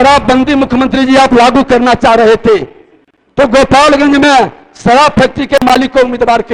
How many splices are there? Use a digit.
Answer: 0